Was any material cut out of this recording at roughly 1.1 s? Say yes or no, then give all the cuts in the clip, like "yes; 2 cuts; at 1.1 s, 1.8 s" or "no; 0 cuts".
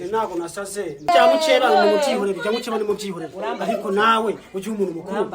yes; 1 cut; at 1.1 s